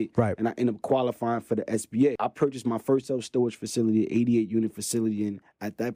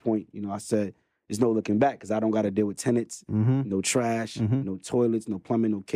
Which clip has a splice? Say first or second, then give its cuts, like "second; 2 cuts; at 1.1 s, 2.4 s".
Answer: first; 1 cut; at 2.2 s